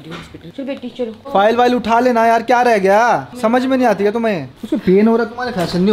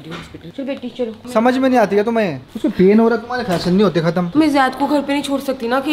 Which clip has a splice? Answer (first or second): second